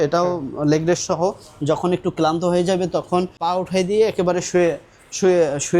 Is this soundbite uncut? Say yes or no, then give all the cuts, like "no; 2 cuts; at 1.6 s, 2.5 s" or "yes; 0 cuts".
no; 1 cut; at 3.4 s